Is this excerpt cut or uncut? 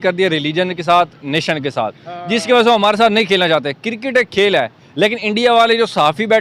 uncut